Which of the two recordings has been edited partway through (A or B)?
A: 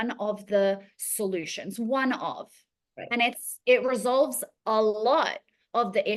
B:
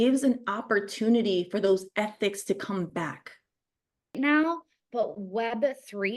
B